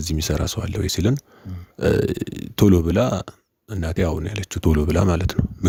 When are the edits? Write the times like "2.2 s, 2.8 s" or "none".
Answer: none

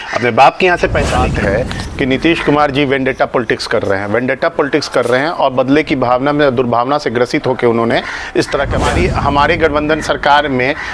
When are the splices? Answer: 1.3 s, 8.8 s

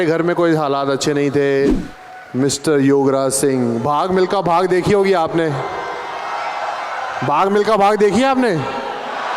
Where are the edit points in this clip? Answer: 1.8 s

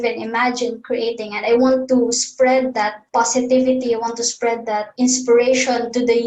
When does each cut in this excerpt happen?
3.0 s, 4.9 s

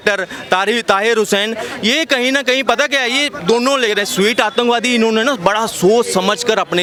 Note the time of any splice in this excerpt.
none

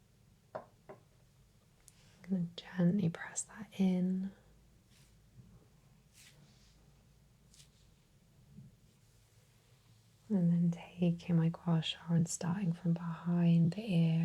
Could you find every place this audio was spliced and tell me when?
9.0 s

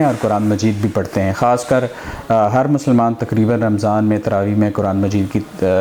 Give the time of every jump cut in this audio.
none

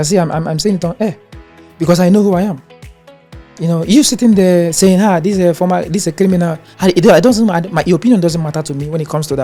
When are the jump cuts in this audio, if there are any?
none

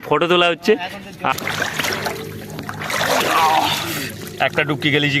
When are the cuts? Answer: 1.3 s

